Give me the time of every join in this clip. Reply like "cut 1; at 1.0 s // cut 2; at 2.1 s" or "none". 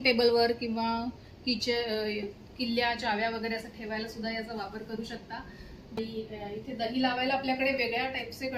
cut 1; at 6.0 s